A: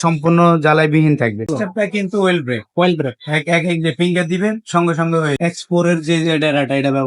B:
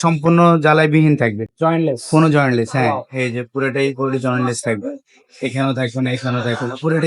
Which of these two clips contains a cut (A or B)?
A